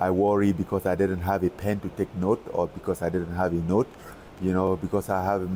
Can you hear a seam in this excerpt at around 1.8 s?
no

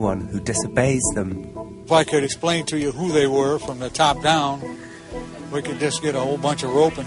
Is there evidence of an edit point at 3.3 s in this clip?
yes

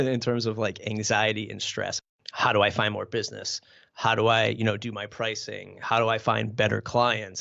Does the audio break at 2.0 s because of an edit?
yes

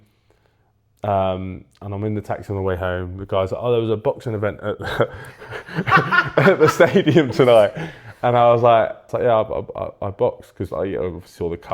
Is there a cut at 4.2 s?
no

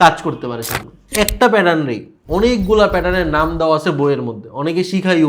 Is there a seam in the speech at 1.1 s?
yes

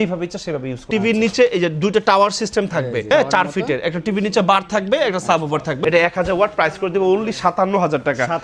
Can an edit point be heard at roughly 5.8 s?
yes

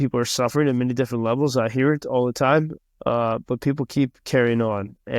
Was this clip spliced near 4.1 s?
no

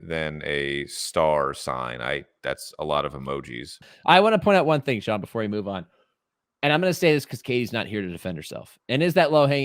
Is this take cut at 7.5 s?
no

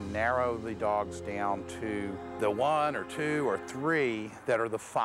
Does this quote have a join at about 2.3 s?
yes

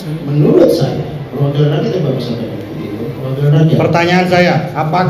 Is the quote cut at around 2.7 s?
no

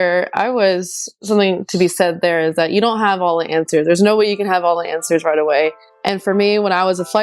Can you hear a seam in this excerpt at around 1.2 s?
yes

